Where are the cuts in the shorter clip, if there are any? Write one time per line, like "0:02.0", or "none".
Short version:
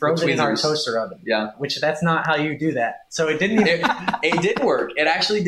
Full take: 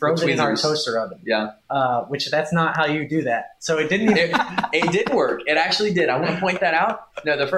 0:01.6